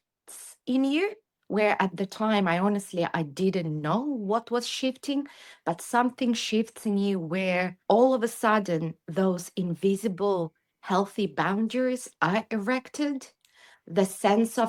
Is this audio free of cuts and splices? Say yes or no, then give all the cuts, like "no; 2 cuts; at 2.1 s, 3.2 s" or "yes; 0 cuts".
yes; 0 cuts